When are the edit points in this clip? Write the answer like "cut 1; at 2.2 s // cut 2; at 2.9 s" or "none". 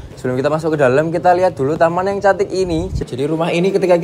cut 1; at 3.0 s